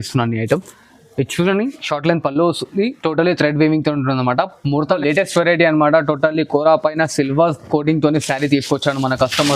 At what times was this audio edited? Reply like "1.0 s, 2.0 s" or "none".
4.9 s